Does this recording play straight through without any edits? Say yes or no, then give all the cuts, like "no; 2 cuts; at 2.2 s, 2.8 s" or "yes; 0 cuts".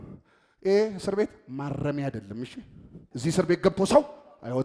no; 1 cut; at 3.1 s